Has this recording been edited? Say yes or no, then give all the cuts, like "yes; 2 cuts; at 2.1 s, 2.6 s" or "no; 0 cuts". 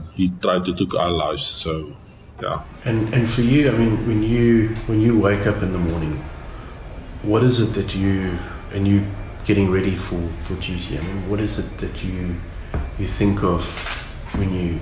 yes; 1 cut; at 2.8 s